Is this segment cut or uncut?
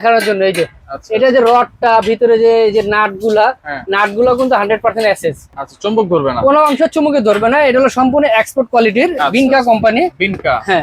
uncut